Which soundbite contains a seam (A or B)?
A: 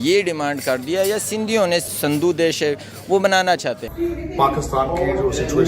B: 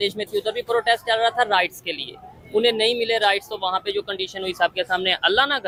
A